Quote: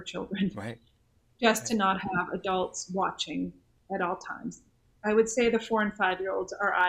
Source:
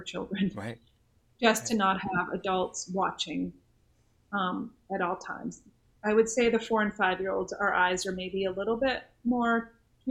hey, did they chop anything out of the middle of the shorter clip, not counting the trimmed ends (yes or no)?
yes